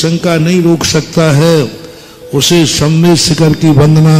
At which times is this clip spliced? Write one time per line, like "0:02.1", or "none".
none